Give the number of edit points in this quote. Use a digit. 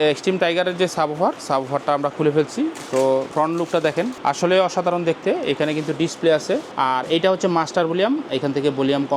3